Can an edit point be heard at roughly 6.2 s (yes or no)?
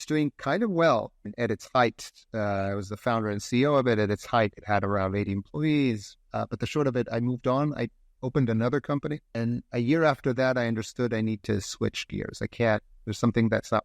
yes